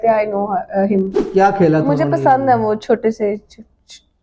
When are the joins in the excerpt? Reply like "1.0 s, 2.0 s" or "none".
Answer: 1.2 s